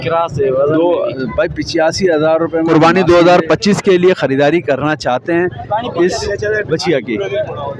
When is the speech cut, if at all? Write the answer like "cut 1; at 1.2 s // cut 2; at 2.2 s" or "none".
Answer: cut 1; at 2.7 s